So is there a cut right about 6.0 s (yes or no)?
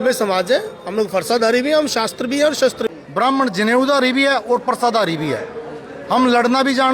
no